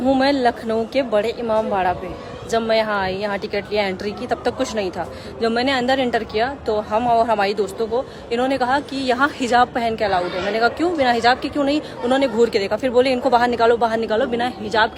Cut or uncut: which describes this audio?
uncut